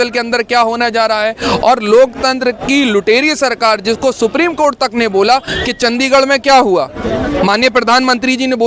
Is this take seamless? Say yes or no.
yes